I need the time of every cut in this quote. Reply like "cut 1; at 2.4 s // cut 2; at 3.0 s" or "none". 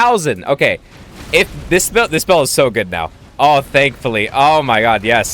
none